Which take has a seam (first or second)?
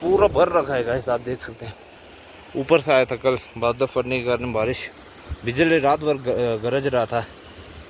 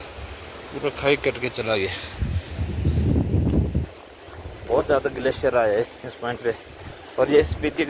second